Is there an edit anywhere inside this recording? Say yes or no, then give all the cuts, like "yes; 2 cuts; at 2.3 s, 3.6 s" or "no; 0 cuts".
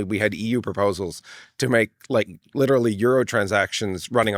no; 0 cuts